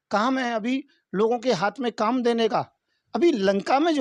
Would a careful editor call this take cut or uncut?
uncut